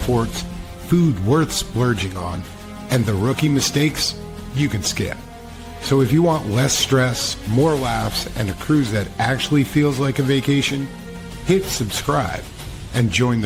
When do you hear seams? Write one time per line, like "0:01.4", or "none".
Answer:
none